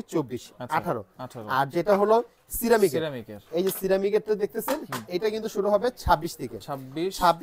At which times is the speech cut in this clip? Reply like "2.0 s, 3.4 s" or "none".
none